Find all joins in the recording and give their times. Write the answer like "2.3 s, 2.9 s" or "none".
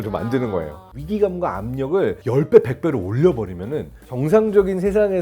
1.0 s, 2.2 s, 4.1 s